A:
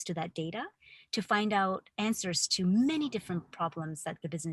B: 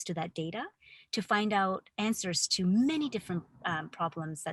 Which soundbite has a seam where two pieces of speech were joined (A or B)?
A